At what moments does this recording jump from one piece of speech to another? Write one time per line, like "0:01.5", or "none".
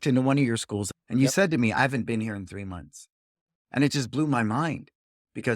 0:00.9